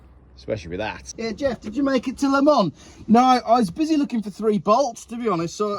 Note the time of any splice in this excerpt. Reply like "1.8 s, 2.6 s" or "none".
1.0 s